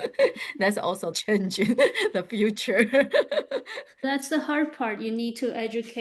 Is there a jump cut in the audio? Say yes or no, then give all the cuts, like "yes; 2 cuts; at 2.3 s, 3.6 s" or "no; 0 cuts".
yes; 2 cuts; at 1.1 s, 4.0 s